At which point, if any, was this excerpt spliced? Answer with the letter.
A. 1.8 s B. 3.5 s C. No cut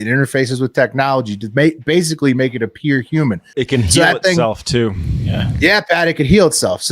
B